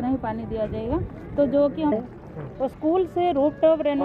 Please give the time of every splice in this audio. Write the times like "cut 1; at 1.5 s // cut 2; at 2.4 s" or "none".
cut 1; at 1.9 s